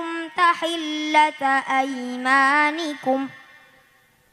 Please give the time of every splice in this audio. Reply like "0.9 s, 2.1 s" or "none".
none